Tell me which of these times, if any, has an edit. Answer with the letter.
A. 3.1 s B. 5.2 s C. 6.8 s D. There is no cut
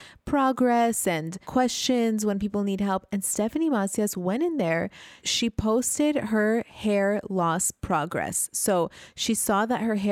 B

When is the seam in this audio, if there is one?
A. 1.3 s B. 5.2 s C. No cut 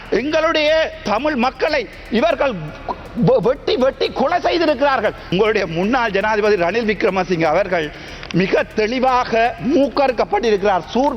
B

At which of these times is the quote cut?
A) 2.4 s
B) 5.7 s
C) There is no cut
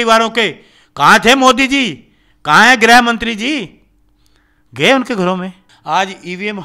B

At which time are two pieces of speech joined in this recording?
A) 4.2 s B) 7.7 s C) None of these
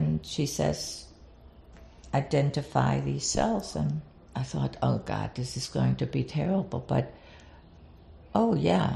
A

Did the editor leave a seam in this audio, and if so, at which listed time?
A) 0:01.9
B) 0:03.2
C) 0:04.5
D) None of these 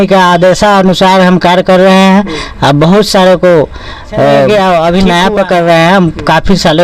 C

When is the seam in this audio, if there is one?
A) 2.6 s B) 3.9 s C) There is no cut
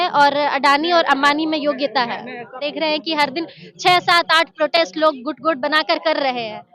A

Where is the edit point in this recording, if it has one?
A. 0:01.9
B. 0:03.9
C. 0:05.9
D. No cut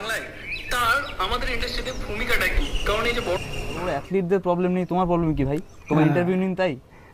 B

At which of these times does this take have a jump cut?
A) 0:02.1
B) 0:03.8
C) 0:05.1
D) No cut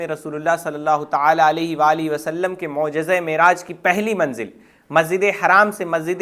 D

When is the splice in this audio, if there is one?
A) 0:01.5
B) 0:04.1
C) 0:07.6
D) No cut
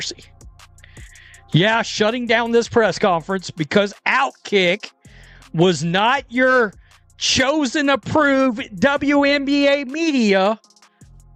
D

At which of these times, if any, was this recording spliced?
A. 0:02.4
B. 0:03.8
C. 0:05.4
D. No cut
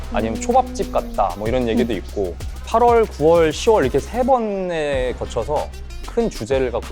A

